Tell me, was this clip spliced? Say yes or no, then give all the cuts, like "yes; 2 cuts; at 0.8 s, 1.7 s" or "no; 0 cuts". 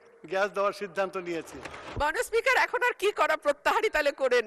yes; 1 cut; at 1.9 s